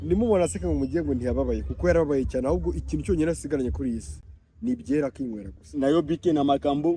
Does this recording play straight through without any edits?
yes; 0 cuts

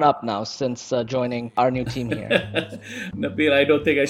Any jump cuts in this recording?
yes; 1 cut; at 3.0 s

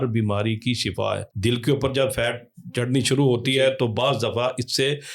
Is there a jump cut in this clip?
yes; 1 cut; at 1.3 s

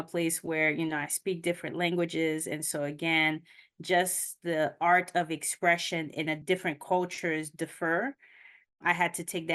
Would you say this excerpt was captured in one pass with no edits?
no; 1 cut; at 6.4 s

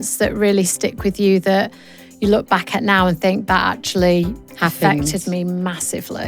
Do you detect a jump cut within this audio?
no; 0 cuts

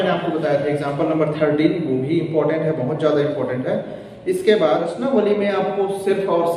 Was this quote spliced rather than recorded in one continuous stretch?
yes; 1 cut; at 4.9 s

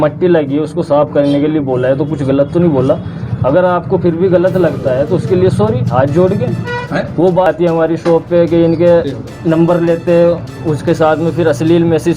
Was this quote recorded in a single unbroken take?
no; 1 cut; at 7.5 s

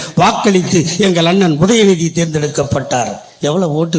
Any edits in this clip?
no; 0 cuts

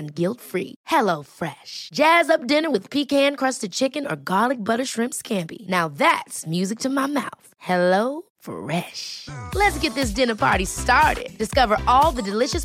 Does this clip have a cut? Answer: no; 0 cuts

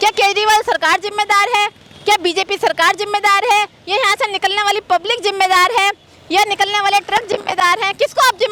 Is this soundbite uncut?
yes; 0 cuts

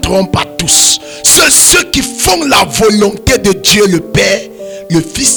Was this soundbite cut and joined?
no; 0 cuts

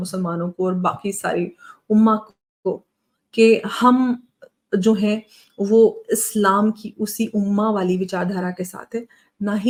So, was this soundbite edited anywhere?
no; 0 cuts

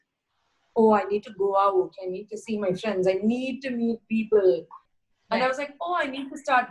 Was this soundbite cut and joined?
yes; 1 cut; at 4.8 s

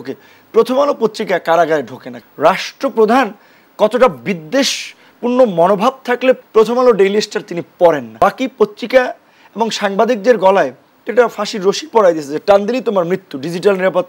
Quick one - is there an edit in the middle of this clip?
yes; 3 cuts; at 2.1 s, 6.4 s, 8.1 s

